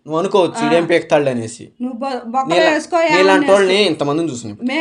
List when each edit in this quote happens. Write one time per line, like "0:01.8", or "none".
none